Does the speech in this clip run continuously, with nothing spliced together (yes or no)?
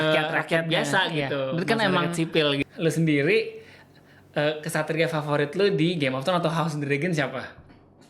no